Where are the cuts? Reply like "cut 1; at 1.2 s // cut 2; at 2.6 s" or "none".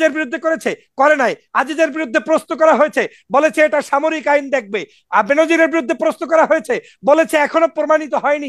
none

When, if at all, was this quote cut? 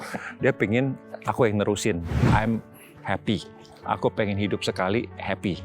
cut 1; at 2.1 s

